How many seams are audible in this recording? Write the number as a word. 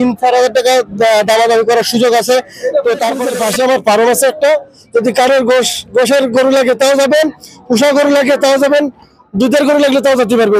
one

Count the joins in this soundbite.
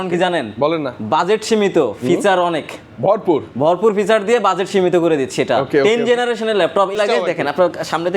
one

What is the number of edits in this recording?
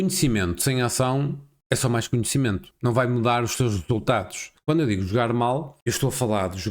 four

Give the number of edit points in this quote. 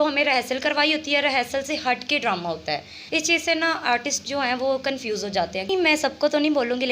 two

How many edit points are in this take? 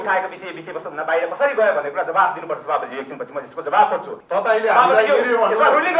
one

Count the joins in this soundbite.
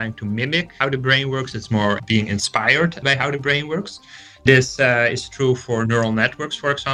three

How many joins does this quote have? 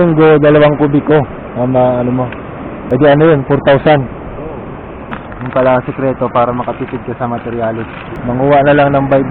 three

